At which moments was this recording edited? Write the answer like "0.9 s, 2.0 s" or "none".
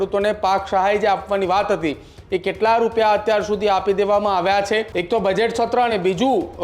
4.9 s